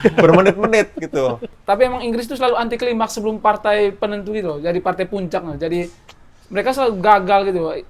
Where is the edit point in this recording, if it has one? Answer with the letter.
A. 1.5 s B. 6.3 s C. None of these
A